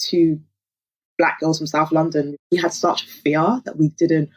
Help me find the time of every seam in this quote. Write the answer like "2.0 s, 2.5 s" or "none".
2.3 s